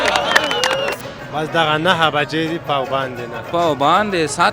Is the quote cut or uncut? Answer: cut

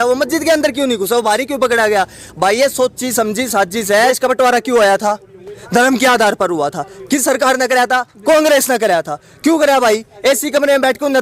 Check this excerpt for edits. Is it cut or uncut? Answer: cut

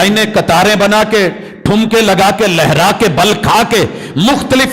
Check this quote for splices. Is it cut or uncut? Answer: uncut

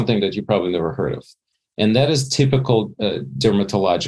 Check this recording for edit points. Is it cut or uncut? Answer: uncut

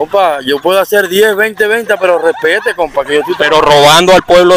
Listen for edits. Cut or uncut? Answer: cut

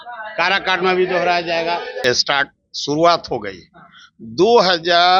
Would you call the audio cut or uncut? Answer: cut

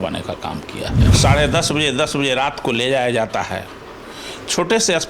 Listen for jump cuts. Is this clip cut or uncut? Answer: cut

